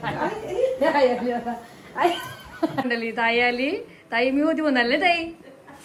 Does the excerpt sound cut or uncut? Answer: cut